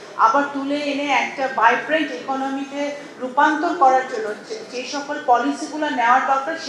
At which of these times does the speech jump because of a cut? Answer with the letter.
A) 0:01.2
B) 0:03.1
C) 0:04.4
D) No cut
D